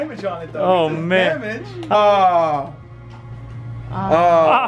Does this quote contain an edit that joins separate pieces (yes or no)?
yes